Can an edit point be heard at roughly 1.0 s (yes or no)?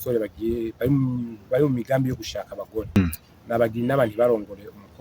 no